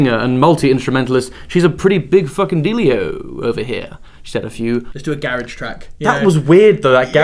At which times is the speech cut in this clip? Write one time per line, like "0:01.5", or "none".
none